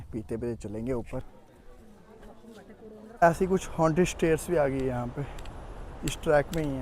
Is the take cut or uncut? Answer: cut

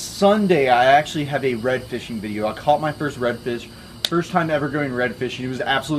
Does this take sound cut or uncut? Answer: uncut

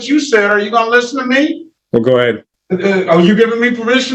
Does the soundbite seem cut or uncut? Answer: cut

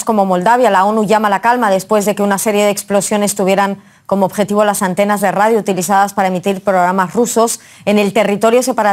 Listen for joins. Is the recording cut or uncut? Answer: uncut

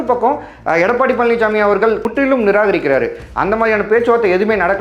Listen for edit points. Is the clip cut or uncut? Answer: cut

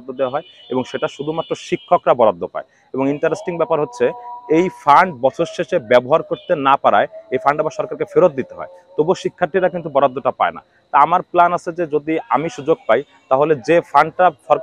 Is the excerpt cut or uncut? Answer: uncut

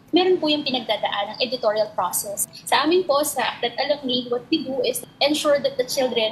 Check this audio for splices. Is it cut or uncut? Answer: cut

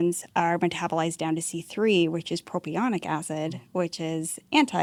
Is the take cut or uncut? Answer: uncut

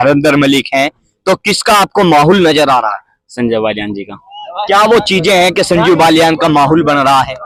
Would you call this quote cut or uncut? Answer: uncut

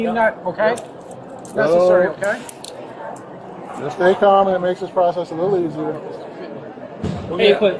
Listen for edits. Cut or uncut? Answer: uncut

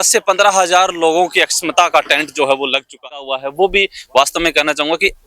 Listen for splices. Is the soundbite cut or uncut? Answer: cut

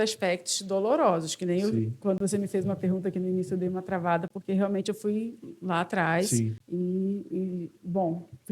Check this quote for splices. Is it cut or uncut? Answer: cut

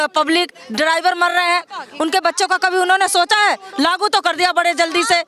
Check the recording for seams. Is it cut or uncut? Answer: uncut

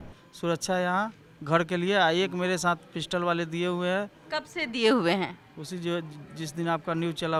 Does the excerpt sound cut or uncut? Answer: uncut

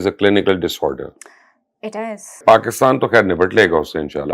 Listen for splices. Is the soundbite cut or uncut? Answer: cut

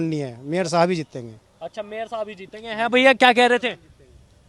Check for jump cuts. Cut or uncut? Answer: uncut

